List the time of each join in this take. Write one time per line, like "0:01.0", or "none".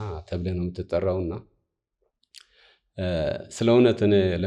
none

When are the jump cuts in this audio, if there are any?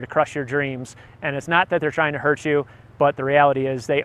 none

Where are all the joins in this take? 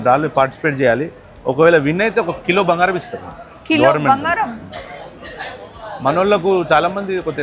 none

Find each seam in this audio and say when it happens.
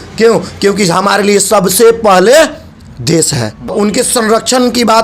0:03.7

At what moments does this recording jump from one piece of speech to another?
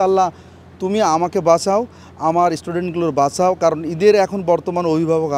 none

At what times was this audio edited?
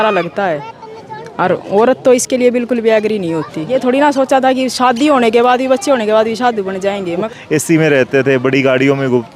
0:03.6
0:07.2

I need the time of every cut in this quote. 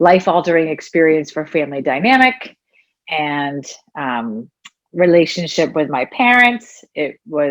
none

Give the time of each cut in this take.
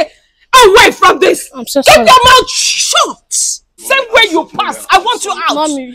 0:03.8

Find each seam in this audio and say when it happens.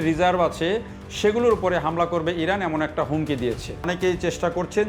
0:03.9

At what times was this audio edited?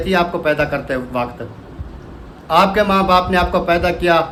none

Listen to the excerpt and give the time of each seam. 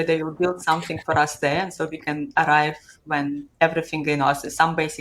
none

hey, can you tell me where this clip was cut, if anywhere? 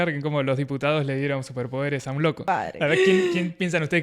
0:02.4

